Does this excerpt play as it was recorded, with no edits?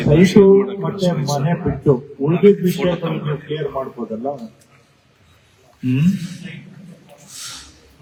yes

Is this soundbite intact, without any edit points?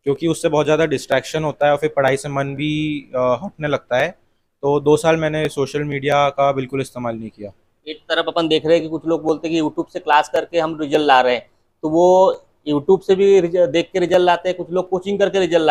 yes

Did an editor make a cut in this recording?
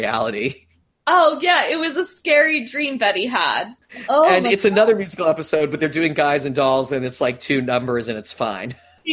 yes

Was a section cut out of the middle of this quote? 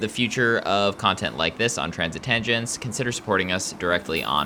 no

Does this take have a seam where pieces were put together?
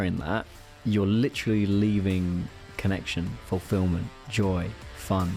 yes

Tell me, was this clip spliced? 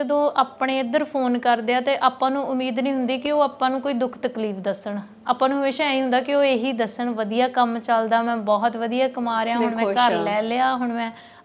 no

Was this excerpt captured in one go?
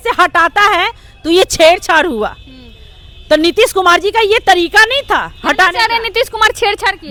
yes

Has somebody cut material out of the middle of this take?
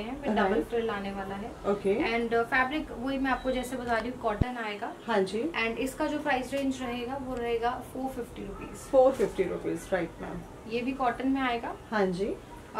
no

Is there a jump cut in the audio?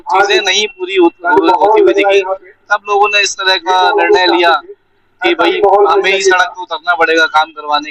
no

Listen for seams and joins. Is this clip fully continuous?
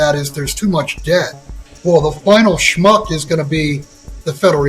no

